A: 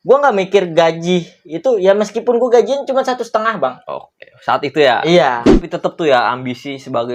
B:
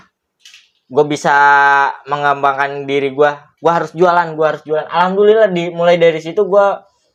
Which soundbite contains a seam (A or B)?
A